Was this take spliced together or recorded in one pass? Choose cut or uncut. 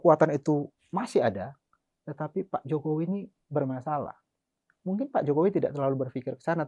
uncut